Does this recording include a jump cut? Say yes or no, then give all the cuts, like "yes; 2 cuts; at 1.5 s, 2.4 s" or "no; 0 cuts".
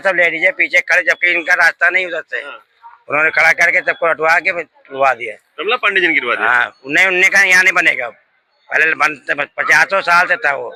no; 0 cuts